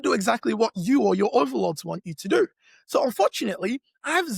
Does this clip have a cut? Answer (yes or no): no